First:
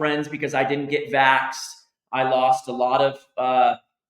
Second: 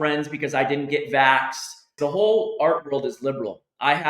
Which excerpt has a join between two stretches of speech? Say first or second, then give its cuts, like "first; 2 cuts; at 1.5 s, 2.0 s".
second; 1 cut; at 1.9 s